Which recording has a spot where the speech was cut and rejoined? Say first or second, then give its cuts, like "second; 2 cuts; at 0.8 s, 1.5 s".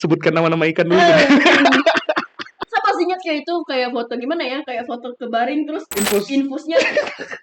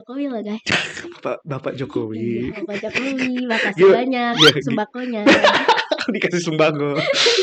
first; 1 cut; at 2.6 s